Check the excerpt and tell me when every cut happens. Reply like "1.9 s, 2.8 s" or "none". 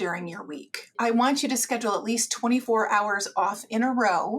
0.9 s, 2.6 s